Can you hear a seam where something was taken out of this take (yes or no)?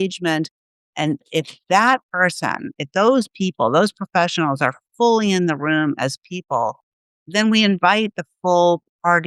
no